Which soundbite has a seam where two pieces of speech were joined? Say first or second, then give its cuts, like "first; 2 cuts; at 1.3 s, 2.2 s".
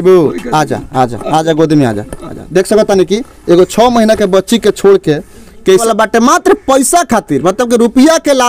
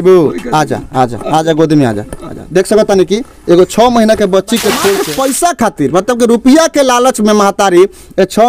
second; 1 cut; at 5.1 s